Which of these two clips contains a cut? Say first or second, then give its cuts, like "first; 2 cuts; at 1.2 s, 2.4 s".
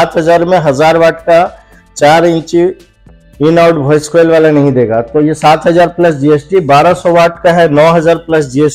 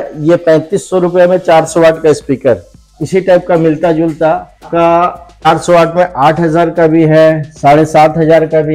second; 3 cuts; at 2.9 s, 4.7 s, 5.5 s